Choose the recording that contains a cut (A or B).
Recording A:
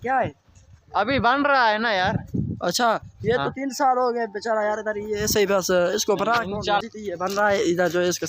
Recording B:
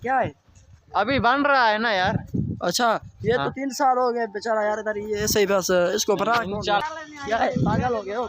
B